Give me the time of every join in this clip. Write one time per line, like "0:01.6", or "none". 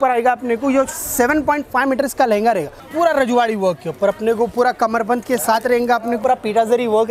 0:02.8
0:06.2

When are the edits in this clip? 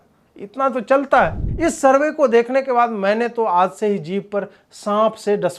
0:01.4

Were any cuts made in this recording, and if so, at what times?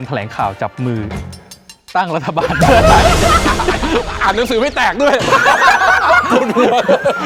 none

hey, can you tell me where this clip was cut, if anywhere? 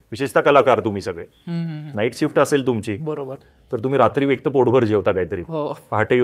none

